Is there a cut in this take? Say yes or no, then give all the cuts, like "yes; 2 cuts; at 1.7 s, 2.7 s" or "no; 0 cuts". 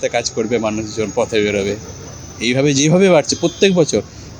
no; 0 cuts